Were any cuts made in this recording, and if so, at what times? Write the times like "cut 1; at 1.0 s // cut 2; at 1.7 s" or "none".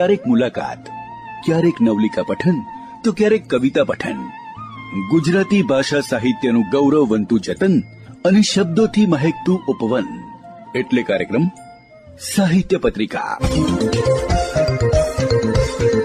none